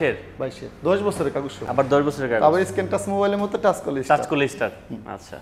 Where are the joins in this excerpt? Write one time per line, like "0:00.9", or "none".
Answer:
none